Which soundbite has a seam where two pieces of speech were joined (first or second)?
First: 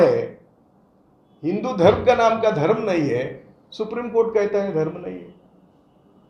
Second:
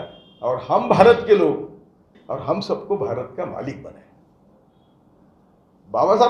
second